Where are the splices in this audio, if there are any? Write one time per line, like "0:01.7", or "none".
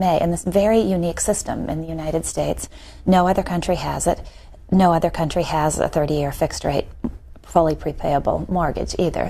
0:01.5